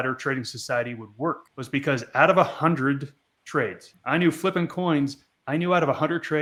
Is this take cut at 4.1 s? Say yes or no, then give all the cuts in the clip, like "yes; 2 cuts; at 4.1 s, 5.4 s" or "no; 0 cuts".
no; 0 cuts